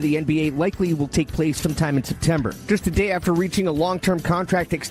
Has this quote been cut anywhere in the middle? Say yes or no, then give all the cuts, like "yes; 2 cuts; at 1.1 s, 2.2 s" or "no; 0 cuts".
yes; 1 cut; at 2.6 s